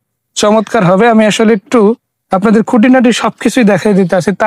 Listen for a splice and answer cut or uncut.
uncut